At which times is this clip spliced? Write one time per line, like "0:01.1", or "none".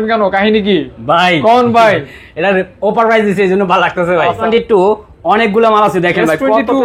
0:04.5

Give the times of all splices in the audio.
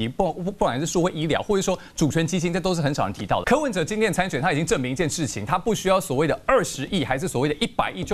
0:03.4

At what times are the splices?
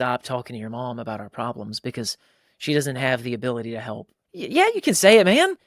0:04.2

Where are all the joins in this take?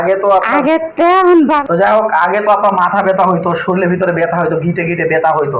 0:01.6

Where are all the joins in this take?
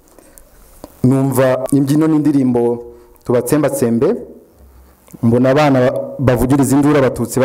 0:01.6

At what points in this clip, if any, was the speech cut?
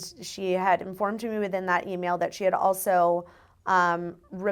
none

